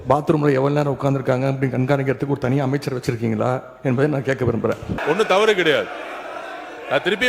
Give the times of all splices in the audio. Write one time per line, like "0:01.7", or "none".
0:05.0